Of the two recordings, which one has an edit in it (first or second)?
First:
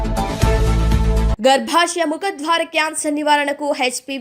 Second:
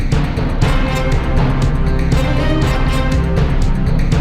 first